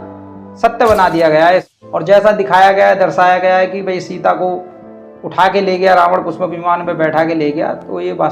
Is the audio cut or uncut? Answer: cut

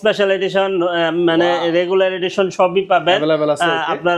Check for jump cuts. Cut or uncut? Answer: uncut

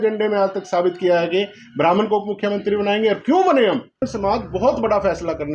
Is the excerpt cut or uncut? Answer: cut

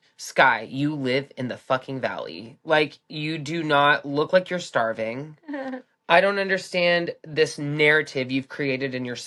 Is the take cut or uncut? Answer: uncut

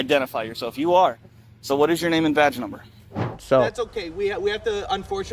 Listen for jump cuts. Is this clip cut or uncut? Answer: cut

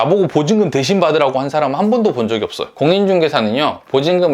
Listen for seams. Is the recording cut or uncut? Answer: cut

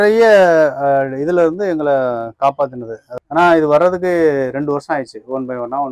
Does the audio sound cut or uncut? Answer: cut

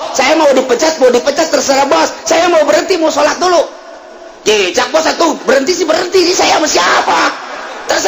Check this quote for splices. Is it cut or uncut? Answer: uncut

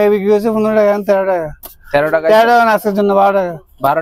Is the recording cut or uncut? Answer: uncut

